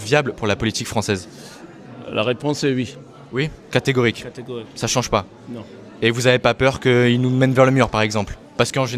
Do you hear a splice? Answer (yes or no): no